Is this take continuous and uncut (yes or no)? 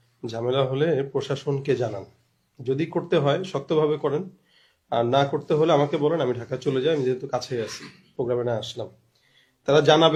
yes